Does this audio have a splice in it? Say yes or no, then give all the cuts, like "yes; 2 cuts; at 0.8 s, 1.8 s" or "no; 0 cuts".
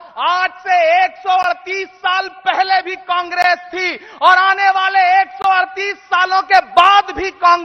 no; 0 cuts